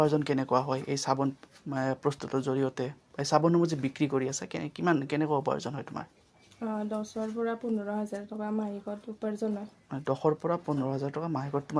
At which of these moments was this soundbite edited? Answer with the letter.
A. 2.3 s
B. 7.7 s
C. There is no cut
C